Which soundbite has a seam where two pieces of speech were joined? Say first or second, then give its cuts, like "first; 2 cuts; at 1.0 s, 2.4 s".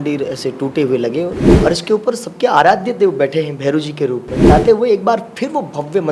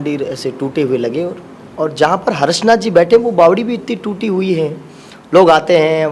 first; 2 cuts; at 1.5 s, 4.5 s